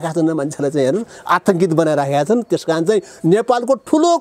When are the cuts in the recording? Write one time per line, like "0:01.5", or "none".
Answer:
none